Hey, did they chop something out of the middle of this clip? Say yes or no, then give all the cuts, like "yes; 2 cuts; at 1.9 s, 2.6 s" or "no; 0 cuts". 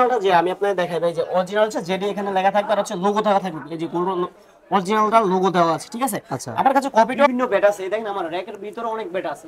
yes; 1 cut; at 7.3 s